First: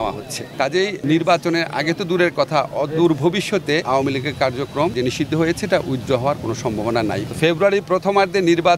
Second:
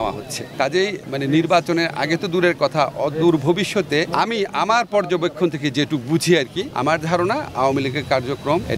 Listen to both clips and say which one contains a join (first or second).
first